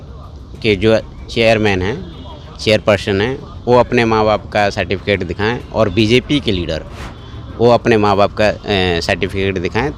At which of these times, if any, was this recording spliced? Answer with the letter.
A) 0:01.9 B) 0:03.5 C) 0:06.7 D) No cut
D